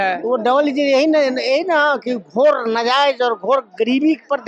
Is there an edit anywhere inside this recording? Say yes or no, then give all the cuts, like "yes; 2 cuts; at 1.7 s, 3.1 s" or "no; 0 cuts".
no; 0 cuts